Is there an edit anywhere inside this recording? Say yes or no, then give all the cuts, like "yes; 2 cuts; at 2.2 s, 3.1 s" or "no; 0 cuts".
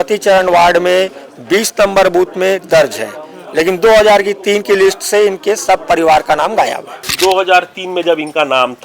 yes; 1 cut; at 7.1 s